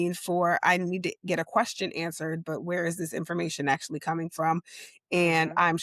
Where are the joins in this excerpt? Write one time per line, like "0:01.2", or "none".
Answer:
none